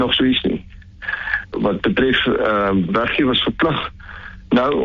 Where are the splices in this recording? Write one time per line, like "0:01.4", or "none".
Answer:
0:01.5
0:02.9

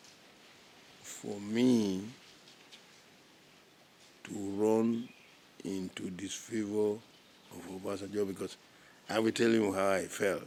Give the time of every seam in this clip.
none

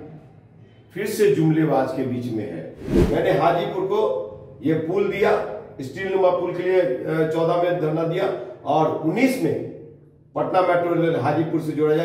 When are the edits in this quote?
0:03.0

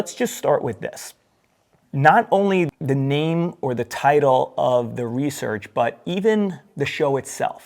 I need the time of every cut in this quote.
0:02.7

